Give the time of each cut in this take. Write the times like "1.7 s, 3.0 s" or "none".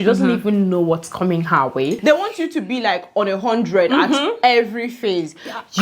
2.0 s